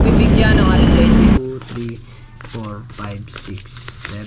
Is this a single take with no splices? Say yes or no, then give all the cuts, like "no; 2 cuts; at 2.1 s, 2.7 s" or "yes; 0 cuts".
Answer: no; 1 cut; at 1.4 s